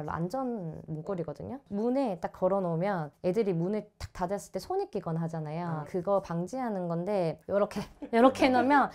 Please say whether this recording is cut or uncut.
uncut